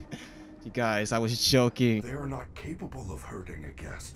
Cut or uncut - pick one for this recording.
cut